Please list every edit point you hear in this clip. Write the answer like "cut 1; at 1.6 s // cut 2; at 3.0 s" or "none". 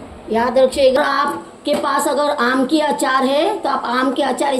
cut 1; at 1.0 s